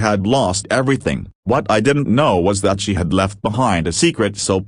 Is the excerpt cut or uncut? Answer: cut